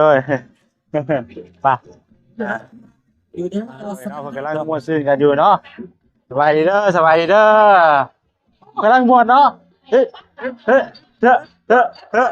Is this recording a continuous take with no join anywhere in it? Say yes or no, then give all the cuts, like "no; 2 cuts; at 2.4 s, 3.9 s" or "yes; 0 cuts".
no; 1 cut; at 4.5 s